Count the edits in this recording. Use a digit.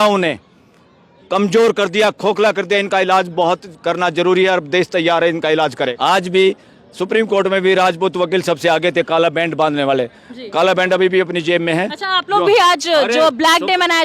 1